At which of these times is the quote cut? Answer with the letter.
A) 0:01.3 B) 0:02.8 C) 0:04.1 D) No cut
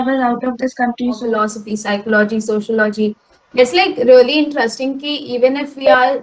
A